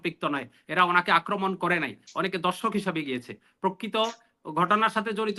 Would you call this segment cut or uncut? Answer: uncut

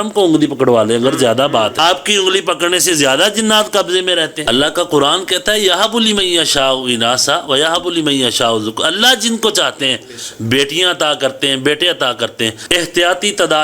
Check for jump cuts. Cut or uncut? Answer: cut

